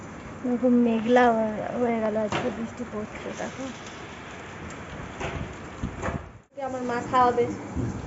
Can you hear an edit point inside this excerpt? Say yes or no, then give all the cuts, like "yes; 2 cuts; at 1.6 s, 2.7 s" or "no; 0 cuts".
yes; 1 cut; at 6.7 s